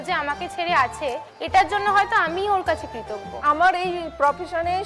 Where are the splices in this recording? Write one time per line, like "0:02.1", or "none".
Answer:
0:03.3